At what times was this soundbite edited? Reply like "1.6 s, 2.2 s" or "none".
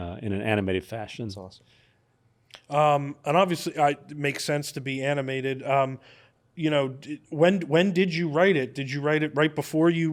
none

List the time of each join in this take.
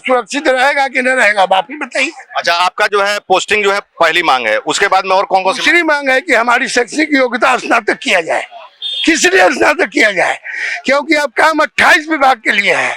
none

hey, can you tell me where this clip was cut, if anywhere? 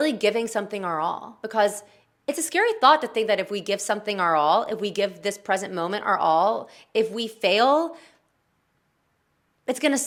none

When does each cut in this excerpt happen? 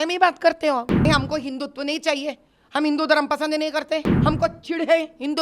1.1 s, 4.1 s

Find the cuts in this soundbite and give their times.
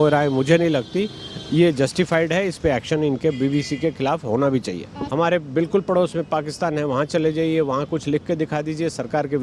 5.0 s

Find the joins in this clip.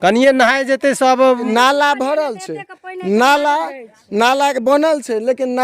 1.5 s

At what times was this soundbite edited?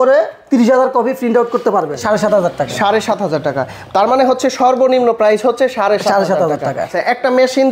2.0 s, 6.9 s

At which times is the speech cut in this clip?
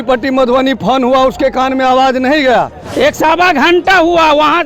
2.8 s

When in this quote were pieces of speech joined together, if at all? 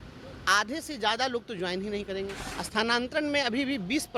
2.4 s

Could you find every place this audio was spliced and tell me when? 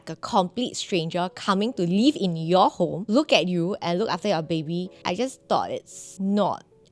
3.0 s, 4.9 s, 6.0 s

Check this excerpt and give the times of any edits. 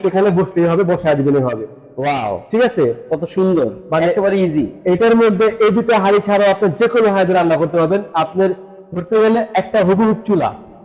none

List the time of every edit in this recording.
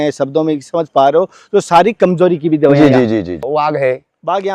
3.5 s

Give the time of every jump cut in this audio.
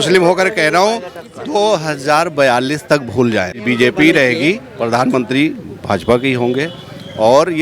3.6 s

